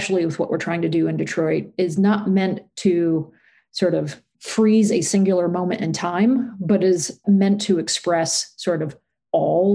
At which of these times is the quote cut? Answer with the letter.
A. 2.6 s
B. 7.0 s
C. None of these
B